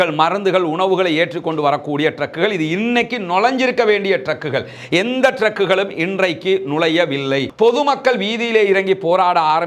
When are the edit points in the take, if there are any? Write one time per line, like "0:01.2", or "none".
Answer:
0:07.5